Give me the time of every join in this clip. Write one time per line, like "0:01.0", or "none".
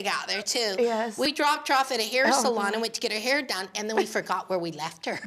0:01.3